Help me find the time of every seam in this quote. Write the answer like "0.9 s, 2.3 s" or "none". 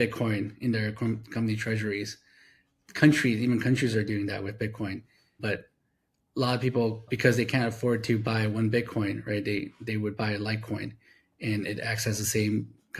5.2 s, 7.0 s